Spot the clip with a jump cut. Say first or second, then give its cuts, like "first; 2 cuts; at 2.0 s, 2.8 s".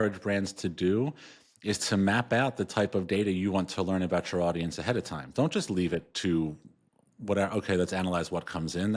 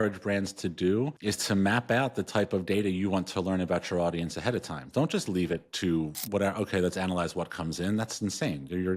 second; 2 cuts; at 1.2 s, 6.2 s